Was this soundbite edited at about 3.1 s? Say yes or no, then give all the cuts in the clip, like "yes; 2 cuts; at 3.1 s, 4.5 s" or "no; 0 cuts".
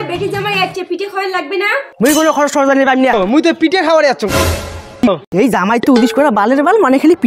yes; 2 cuts; at 3.1 s, 5.1 s